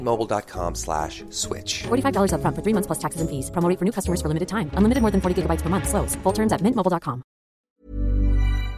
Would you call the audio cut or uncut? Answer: cut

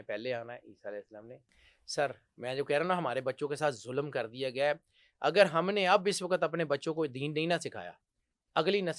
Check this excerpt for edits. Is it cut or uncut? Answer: cut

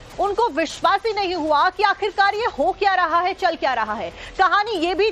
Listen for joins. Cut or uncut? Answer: uncut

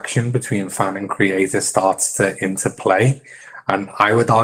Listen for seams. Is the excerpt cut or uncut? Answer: uncut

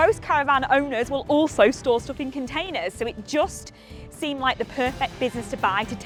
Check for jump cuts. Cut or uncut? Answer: uncut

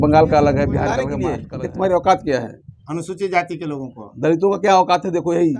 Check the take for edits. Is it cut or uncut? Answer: cut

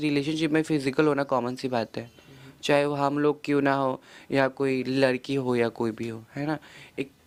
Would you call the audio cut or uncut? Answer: uncut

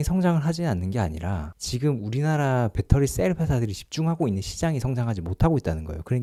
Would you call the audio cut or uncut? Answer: uncut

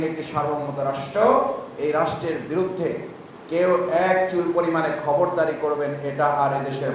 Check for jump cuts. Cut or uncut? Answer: uncut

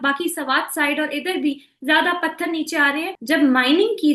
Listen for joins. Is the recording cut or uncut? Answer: cut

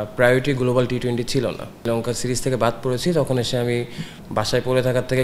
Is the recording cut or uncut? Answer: cut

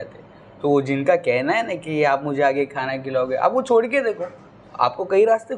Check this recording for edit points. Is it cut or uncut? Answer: uncut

